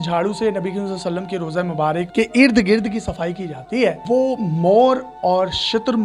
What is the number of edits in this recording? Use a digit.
2